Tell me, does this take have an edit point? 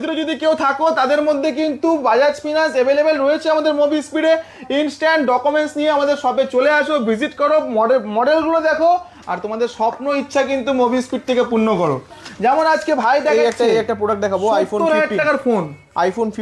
no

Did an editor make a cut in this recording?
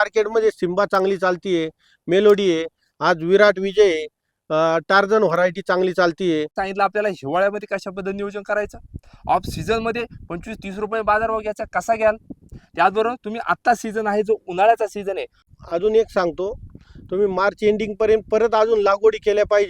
yes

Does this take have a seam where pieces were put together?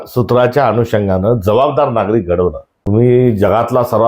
yes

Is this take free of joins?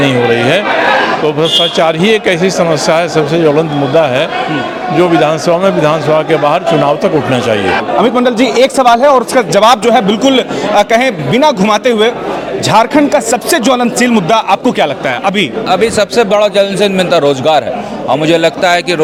yes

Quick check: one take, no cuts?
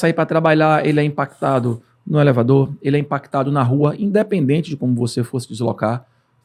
yes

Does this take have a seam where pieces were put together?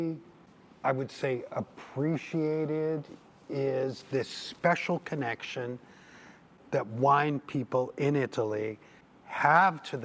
no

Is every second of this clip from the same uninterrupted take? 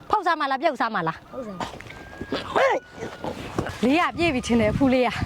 no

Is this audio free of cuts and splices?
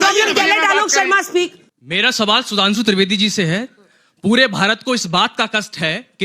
no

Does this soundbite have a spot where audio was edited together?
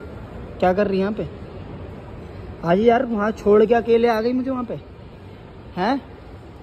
no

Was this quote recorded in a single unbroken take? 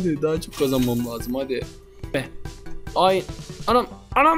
no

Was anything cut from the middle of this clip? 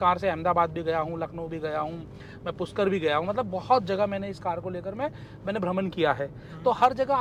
no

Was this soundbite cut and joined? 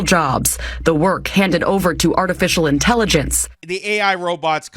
yes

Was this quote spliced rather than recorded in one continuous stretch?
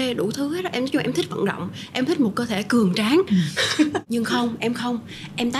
yes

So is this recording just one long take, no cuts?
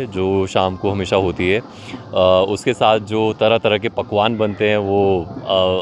yes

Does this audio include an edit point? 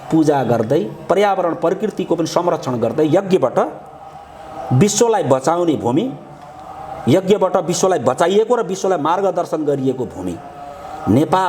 no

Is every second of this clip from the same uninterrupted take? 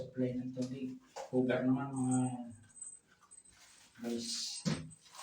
no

